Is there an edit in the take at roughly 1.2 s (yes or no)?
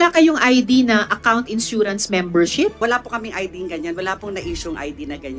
no